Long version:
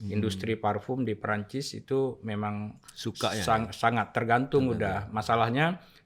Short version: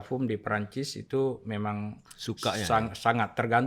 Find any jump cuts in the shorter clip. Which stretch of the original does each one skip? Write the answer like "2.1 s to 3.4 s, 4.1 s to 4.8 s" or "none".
none